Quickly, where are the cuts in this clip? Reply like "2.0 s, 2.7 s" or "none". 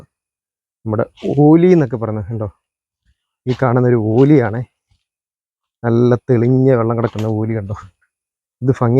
none